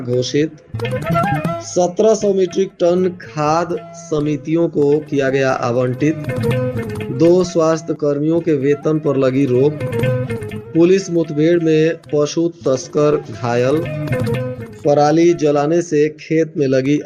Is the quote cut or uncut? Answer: uncut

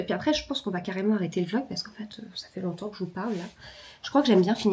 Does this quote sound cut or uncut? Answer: uncut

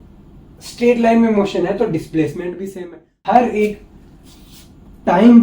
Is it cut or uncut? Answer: cut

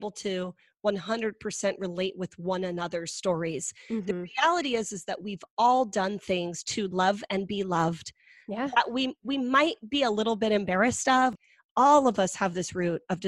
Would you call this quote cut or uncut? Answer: cut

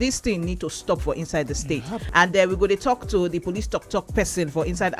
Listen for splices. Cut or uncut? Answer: cut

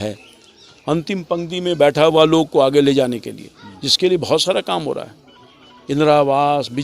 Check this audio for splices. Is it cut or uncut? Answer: uncut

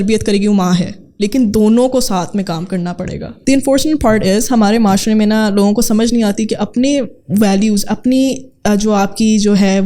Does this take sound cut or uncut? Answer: cut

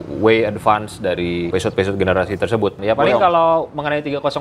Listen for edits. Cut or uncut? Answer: cut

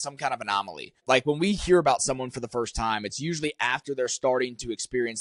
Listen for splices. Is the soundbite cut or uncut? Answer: cut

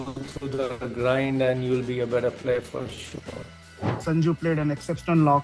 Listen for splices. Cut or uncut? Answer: cut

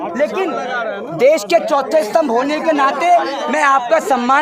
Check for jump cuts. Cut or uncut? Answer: uncut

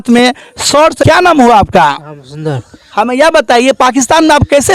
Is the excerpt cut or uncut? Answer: cut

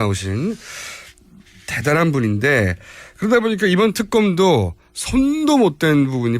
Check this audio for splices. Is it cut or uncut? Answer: uncut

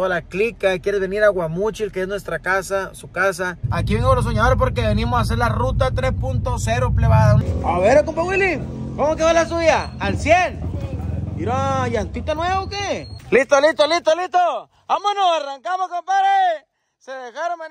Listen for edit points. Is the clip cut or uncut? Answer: cut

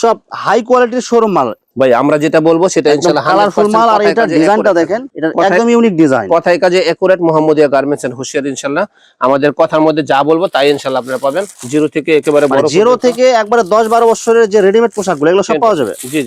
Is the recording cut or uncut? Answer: uncut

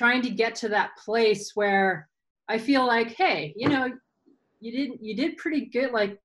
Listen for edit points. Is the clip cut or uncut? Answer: uncut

